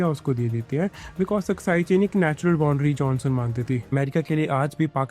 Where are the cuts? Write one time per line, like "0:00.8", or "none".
0:03.9